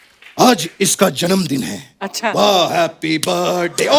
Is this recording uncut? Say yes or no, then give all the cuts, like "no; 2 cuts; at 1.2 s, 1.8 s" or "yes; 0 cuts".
yes; 0 cuts